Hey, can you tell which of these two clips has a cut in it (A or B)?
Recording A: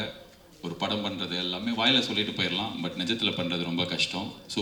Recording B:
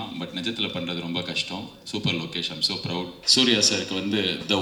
B